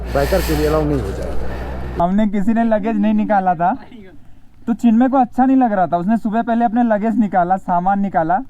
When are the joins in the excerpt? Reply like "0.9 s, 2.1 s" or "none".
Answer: 2.0 s